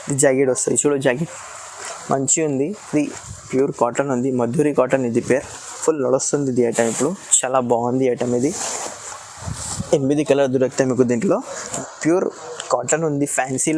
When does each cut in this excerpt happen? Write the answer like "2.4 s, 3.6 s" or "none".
3.2 s, 11.7 s